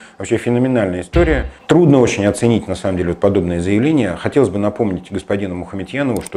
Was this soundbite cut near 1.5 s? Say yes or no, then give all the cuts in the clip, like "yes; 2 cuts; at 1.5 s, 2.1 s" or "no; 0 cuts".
yes; 1 cut; at 1.5 s